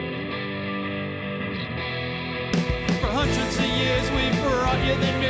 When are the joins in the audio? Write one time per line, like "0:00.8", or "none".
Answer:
none

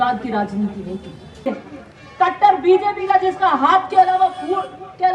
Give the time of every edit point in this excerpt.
0:01.5

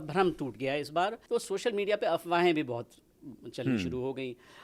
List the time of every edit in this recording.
0:01.2

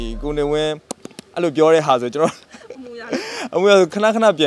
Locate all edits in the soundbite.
none

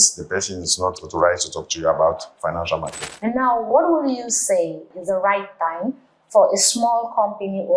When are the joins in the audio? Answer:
0:03.0
0:04.9

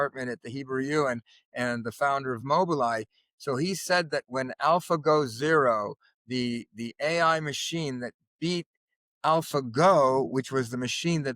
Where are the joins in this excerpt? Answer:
none

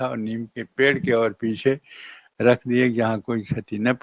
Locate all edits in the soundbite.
none

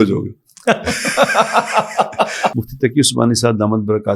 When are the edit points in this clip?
0:02.6

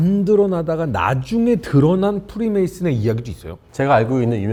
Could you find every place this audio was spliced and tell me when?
none

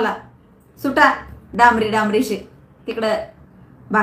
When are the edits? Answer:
none

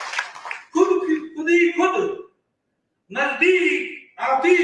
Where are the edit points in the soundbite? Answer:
none

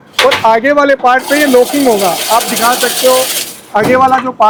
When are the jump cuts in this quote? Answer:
none

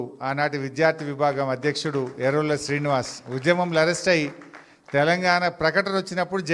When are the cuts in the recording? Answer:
none

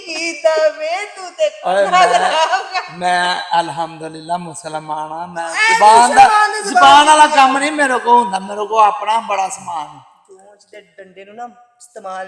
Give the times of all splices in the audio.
none

